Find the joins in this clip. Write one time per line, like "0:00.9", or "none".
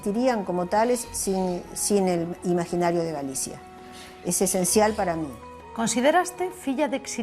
none